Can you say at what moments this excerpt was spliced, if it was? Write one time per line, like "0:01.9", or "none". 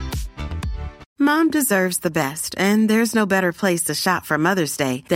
0:01.0